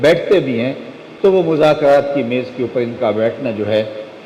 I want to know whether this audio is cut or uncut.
uncut